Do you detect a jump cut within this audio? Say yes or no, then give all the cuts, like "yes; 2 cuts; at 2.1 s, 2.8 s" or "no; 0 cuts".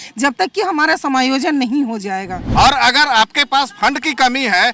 yes; 1 cut; at 2.4 s